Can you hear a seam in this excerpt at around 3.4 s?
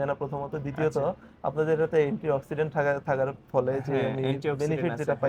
no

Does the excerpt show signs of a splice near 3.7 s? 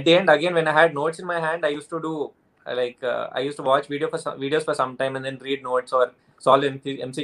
no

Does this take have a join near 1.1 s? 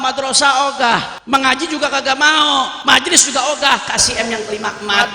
yes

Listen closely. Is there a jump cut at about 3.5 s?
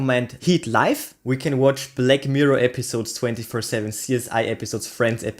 no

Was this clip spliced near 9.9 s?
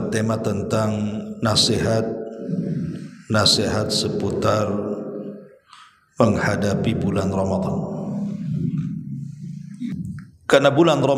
yes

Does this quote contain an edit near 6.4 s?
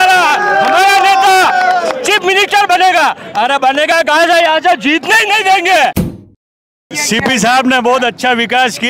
yes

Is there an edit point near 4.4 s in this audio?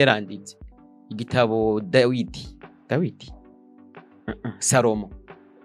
no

